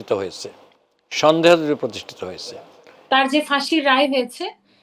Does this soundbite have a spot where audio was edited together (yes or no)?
yes